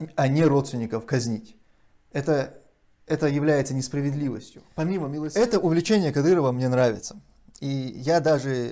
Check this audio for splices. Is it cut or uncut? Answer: cut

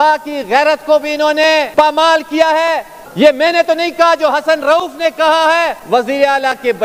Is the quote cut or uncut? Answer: cut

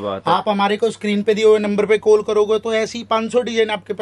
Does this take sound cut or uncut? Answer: uncut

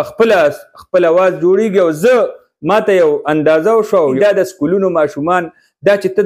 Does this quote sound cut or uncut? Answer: cut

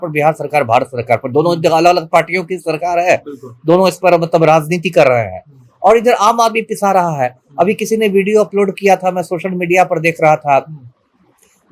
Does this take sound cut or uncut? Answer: uncut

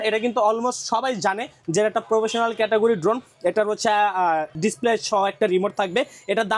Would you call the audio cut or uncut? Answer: uncut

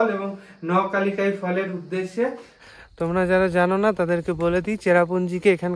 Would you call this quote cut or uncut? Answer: cut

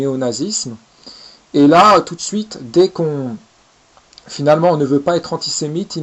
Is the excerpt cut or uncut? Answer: uncut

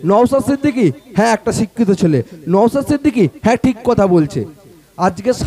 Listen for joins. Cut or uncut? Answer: uncut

